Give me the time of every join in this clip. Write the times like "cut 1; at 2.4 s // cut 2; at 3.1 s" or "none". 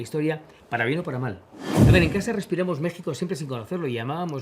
cut 1; at 1.8 s